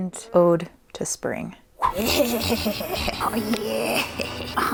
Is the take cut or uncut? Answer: uncut